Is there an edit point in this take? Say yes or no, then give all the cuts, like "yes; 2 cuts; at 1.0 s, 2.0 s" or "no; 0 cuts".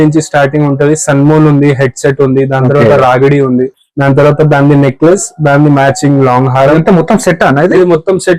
no; 0 cuts